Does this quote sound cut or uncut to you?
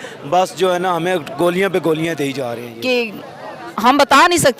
cut